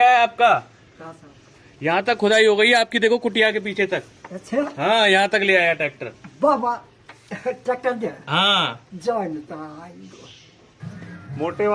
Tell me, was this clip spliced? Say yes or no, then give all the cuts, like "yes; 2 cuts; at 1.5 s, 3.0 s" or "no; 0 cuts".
yes; 1 cut; at 10.7 s